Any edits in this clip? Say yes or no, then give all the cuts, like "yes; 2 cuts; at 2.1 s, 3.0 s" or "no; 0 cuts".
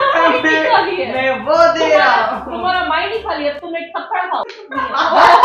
no; 0 cuts